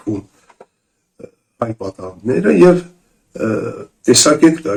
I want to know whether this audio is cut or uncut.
uncut